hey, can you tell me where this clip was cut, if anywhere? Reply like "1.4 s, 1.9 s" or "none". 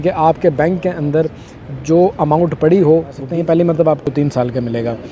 3.2 s, 4.1 s